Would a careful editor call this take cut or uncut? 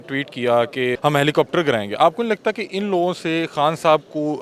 cut